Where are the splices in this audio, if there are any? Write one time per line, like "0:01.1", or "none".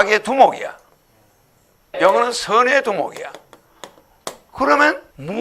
0:01.8
0:04.6

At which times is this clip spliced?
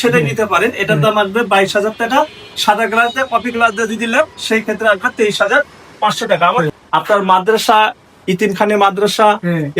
0:06.7

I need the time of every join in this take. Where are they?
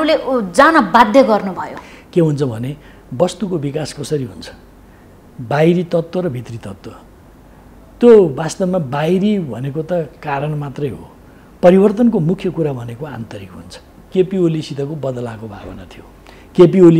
0:14.0

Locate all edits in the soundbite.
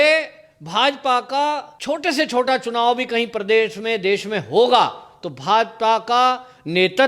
0:01.7

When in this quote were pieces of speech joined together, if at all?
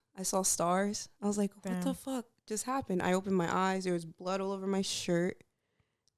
none

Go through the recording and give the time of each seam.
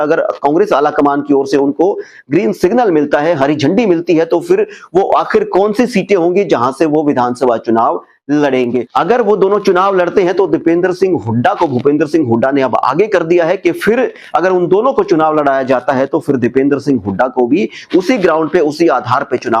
0:08.9

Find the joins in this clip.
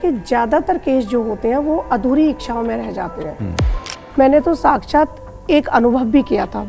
0:03.8

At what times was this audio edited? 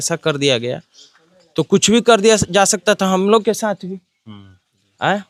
none

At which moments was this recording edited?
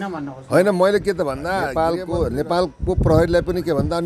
0:01.6

